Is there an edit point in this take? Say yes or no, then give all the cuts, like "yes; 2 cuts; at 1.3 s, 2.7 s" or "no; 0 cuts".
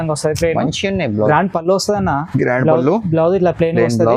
yes; 1 cut; at 1.3 s